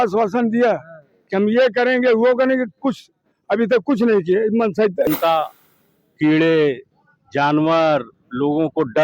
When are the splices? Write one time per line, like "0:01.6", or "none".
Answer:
0:05.1